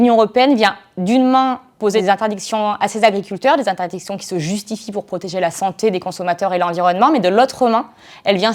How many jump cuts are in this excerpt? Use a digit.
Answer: 1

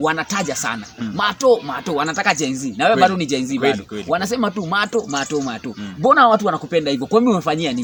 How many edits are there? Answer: 0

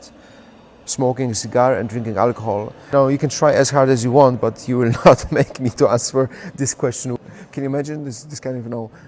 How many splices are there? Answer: 2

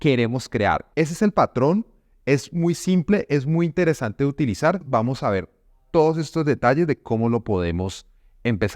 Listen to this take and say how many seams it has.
2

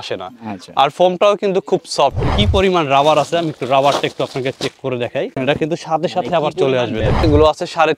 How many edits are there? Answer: 3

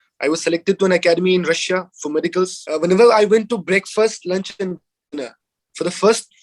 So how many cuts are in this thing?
1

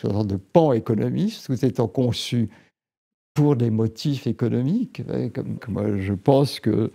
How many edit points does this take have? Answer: 1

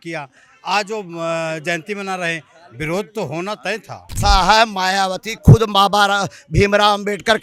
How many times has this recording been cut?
1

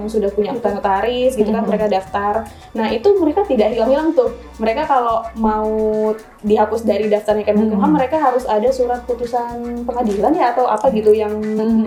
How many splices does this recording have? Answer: 0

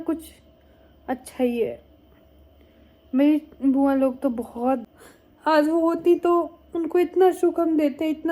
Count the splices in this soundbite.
1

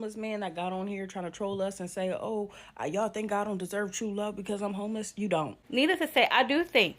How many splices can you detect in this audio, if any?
1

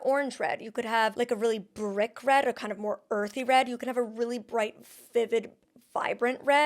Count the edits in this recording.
1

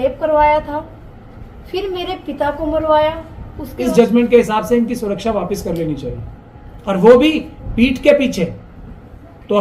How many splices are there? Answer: 1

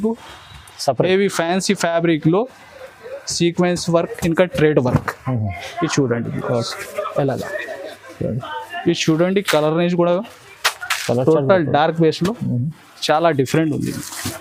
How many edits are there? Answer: 0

